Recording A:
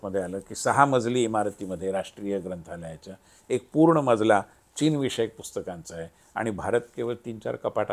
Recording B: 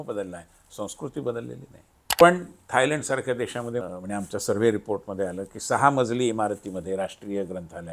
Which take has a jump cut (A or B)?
B